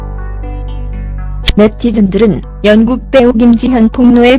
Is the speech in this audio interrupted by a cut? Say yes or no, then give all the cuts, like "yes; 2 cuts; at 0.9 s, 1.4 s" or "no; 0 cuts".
no; 0 cuts